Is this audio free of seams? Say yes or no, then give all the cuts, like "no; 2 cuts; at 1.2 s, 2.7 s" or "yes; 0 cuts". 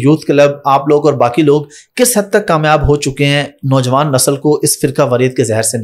yes; 0 cuts